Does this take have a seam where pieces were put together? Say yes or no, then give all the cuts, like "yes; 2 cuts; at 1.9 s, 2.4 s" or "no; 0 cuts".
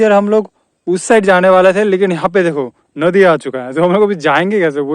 no; 0 cuts